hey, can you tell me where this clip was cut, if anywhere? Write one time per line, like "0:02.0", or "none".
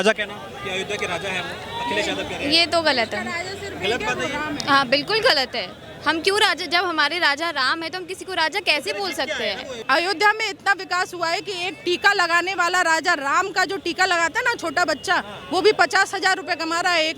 0:09.7